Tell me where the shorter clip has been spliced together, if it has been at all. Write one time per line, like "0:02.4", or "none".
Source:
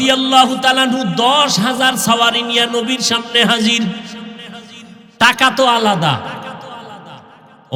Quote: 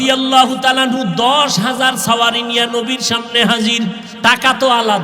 0:04.1

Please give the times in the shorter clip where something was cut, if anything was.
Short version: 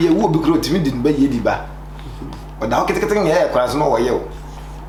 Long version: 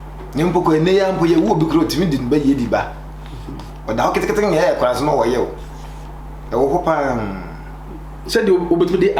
none

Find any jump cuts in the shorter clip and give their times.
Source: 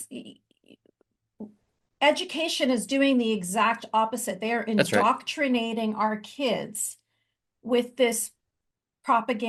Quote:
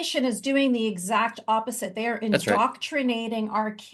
none

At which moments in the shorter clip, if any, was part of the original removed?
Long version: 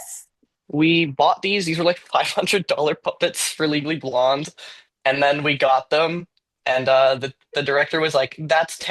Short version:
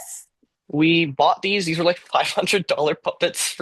none

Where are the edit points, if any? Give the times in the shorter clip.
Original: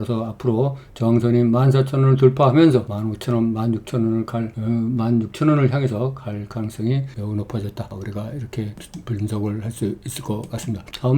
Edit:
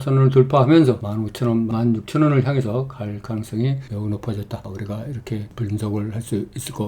0:01.7
0:05.5

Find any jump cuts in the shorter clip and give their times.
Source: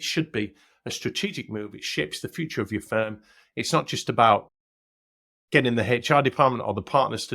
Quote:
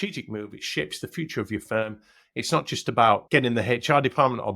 0:03.2

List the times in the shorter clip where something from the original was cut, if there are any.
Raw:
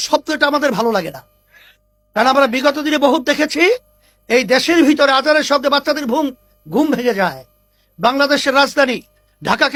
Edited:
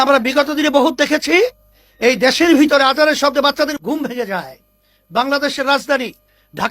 0:03.7

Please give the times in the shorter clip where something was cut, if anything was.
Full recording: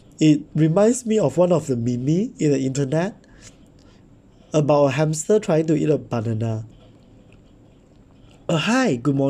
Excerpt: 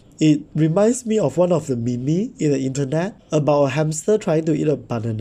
0:03.2

